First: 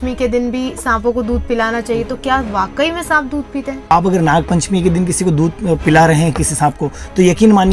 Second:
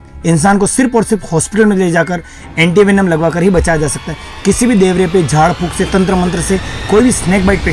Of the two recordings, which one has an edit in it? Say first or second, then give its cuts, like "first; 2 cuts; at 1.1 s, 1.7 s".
first; 1 cut; at 3.9 s